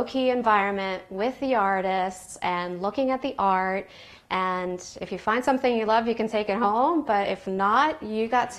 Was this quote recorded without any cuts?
yes; 0 cuts

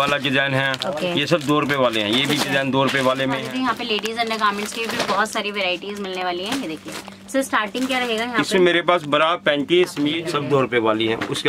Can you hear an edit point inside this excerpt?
yes; 2 cuts; at 3.4 s, 10.2 s

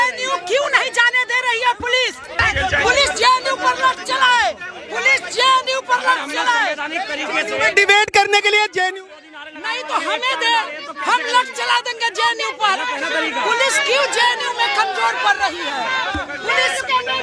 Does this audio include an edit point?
no; 0 cuts

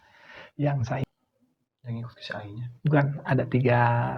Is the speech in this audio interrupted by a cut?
yes; 1 cut; at 1.0 s

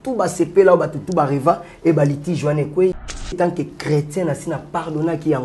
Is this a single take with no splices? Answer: no; 1 cut; at 3.4 s

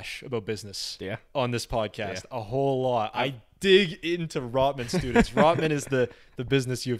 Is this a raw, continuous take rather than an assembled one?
yes; 0 cuts

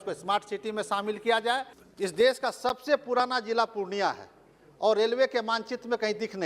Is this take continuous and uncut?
no; 1 cut; at 1.8 s

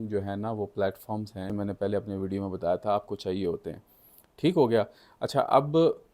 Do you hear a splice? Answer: yes; 1 cut; at 1.5 s

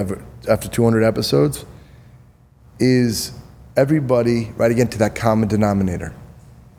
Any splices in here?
no; 0 cuts

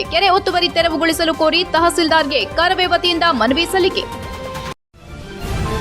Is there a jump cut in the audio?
yes; 1 cut; at 4.7 s

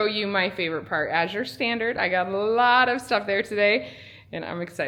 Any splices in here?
no; 0 cuts

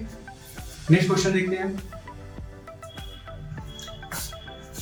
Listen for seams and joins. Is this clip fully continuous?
yes; 0 cuts

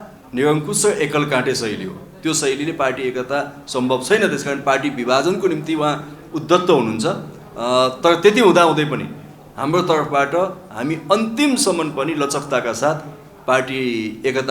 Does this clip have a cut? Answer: no; 0 cuts

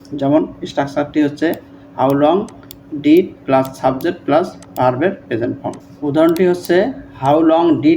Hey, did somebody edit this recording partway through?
no; 0 cuts

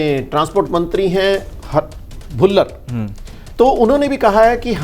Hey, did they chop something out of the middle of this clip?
no; 0 cuts

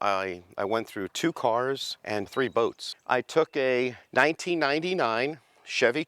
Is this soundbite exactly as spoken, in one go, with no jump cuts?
no; 2 cuts; at 2.3 s, 4.0 s

